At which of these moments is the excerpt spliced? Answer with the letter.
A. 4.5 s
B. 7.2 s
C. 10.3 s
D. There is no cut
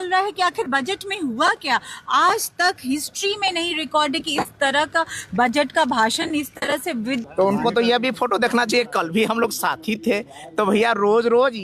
B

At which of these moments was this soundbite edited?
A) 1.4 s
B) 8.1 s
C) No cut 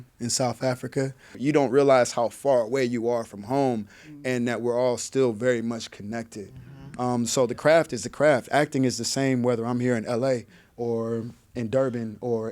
A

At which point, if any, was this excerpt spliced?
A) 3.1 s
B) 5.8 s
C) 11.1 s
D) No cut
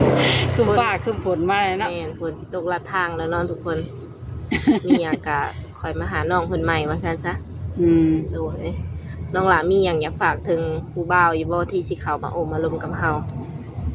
D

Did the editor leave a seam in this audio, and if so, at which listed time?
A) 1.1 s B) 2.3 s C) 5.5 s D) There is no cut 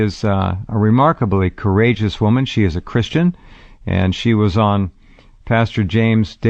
B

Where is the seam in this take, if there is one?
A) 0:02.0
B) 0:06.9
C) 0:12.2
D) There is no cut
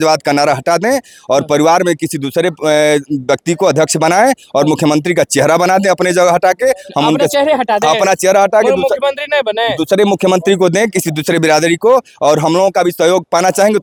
D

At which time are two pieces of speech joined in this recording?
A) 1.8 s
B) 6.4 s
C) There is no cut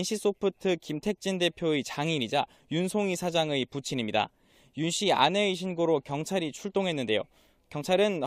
C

